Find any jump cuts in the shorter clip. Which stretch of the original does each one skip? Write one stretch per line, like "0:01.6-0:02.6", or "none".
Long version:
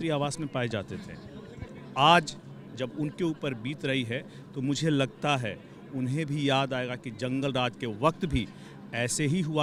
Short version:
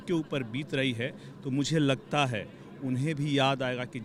none

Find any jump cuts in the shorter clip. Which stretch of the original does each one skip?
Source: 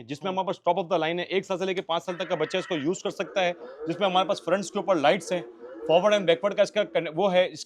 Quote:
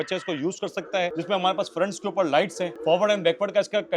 0:03.6-0:03.8
0:05.4-0:05.7

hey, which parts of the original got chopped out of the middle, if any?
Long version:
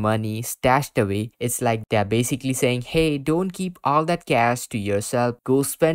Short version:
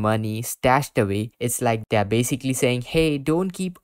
none

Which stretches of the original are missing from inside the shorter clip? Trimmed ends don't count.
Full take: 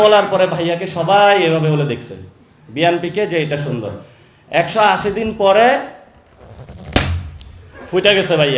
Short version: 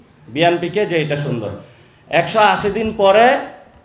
none

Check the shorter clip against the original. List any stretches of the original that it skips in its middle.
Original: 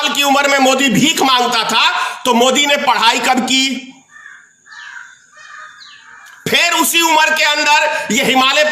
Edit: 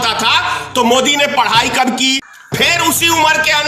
0:03.8-0:06.3

